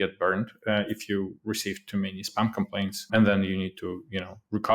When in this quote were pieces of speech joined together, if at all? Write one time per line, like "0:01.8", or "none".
0:03.0